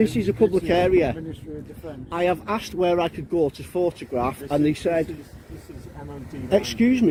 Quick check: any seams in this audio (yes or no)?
no